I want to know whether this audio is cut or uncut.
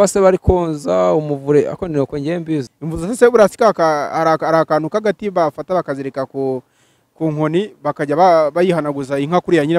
cut